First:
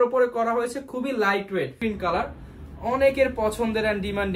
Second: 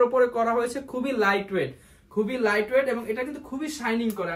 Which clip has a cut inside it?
first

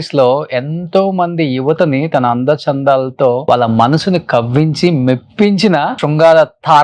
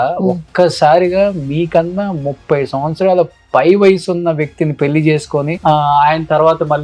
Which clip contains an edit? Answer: first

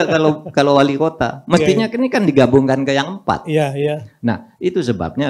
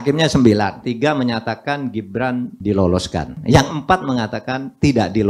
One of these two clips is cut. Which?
second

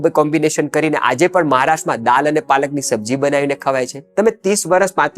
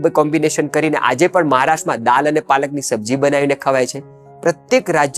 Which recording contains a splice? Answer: first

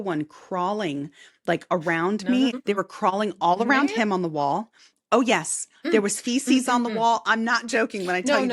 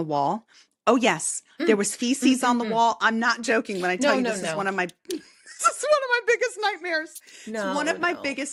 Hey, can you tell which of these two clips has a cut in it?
first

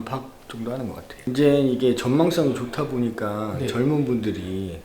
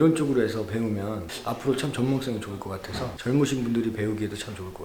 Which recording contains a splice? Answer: first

